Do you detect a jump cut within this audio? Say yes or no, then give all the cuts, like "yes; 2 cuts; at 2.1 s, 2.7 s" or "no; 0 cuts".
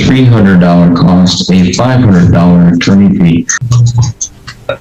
yes; 1 cut; at 3.6 s